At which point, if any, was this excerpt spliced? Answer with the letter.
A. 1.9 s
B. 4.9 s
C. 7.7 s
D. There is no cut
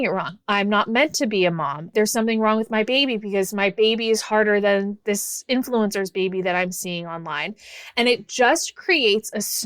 A